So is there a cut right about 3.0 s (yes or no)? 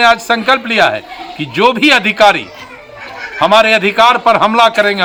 no